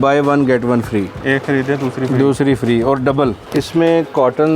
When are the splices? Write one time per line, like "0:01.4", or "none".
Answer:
0:01.1
0:03.4